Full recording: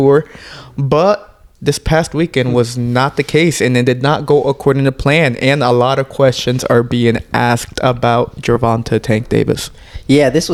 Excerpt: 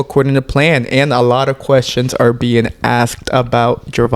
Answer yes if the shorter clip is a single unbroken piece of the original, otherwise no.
yes